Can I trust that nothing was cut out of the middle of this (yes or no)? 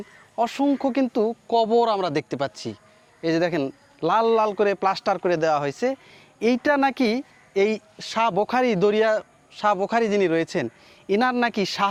yes